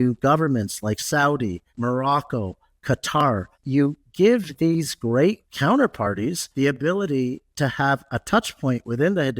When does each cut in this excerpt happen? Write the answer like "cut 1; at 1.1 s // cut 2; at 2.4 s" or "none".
cut 1; at 1.6 s // cut 2; at 3.5 s // cut 3; at 5.5 s // cut 4; at 6.4 s

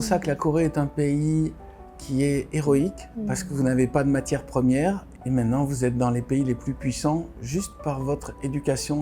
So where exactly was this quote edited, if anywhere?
cut 1; at 3.1 s // cut 2; at 5.1 s

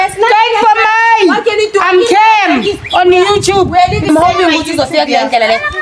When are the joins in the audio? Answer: cut 1; at 4.1 s

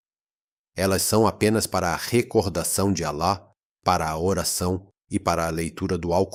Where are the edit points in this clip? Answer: none

